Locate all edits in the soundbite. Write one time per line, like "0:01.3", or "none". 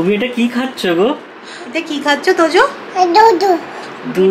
none

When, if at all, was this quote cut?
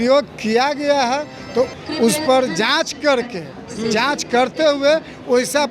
0:01.7

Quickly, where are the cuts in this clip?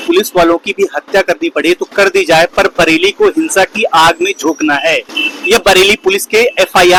none

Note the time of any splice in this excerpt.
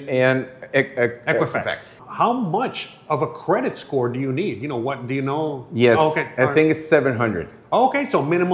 0:02.0

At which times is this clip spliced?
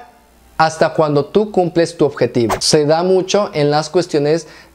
0:02.5

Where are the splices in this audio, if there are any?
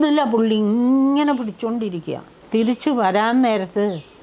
0:02.4

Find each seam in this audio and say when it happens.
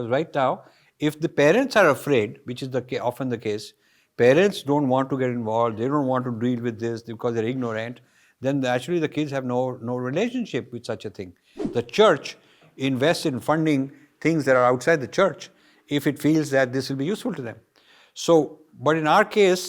0:11.6

